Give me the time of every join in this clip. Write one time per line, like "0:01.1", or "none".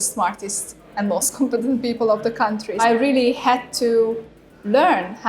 0:02.8